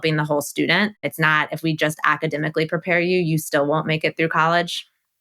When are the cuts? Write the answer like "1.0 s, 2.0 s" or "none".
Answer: 1.1 s